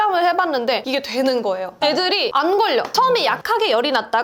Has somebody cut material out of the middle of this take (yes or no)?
yes